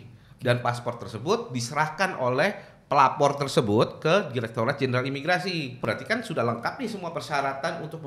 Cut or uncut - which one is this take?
cut